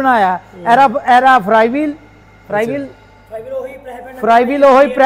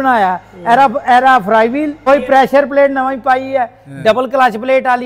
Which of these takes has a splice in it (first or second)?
second